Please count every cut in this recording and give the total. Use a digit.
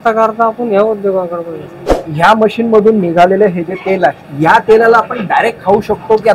2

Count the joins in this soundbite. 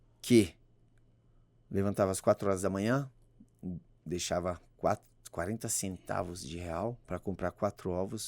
1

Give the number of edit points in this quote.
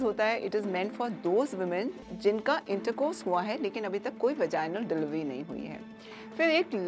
0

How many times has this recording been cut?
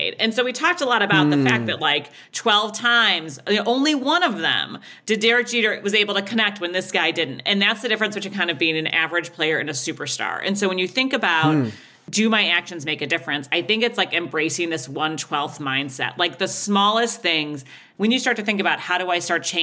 2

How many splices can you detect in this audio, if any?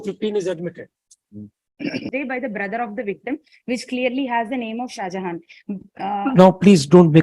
1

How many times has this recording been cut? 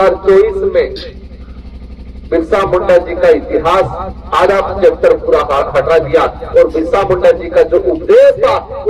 0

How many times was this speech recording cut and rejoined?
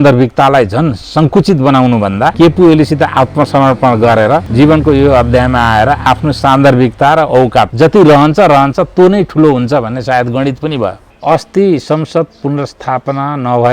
4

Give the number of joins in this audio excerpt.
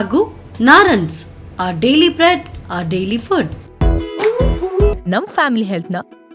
1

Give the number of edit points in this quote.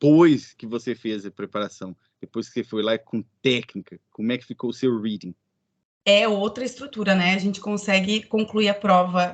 0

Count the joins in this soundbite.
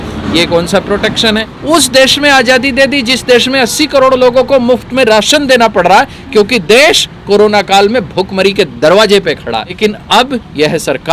2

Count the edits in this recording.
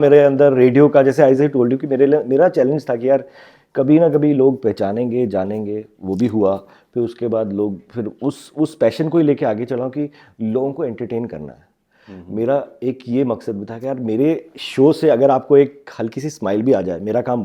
0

